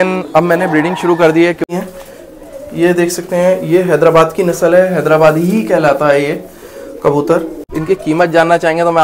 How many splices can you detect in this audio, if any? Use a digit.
2